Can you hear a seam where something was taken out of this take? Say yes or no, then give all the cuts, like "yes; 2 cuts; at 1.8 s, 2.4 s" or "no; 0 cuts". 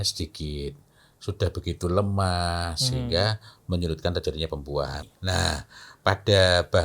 yes; 1 cut; at 5.0 s